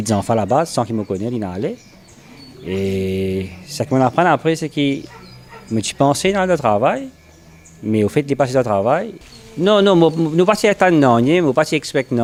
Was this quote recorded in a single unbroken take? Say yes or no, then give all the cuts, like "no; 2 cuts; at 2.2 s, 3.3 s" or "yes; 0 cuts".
yes; 0 cuts